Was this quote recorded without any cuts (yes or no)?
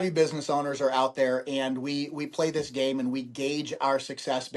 yes